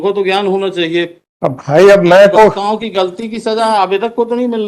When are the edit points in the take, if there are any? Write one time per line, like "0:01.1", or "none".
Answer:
0:01.2